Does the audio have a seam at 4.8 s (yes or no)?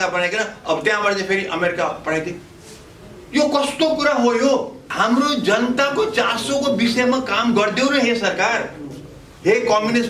yes